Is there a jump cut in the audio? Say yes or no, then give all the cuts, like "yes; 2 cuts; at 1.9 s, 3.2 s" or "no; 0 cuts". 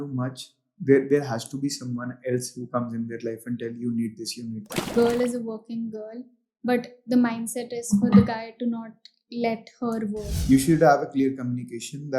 yes; 2 cuts; at 4.9 s, 10.3 s